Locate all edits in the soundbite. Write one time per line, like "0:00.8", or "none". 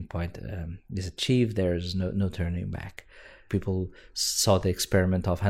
0:03.4